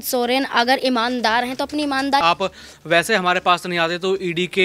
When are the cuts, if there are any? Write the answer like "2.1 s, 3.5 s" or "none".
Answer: 2.2 s